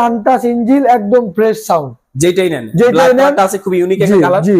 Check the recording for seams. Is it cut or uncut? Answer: uncut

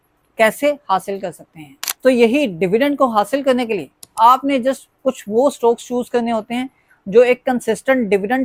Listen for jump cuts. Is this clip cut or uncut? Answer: uncut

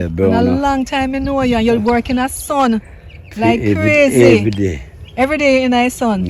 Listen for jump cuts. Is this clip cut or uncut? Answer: uncut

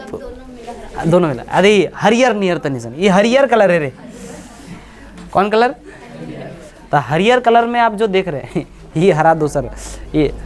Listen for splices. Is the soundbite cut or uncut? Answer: uncut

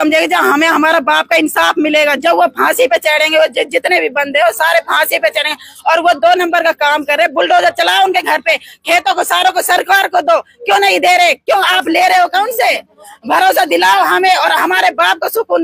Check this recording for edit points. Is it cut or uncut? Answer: uncut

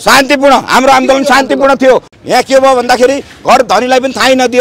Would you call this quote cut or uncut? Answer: cut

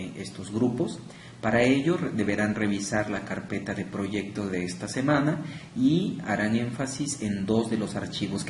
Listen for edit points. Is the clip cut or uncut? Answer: cut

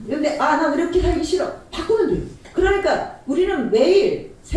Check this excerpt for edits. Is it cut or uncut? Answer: cut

